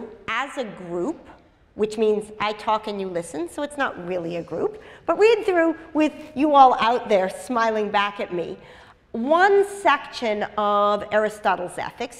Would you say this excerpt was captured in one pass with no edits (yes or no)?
yes